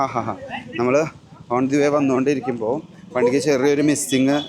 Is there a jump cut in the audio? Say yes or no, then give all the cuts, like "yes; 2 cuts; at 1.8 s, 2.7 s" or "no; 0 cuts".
no; 0 cuts